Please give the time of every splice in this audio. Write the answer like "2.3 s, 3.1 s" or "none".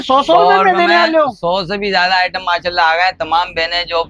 none